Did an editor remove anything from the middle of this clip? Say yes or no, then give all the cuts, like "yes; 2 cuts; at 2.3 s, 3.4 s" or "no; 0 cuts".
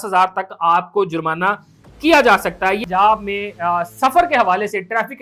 yes; 1 cut; at 2.8 s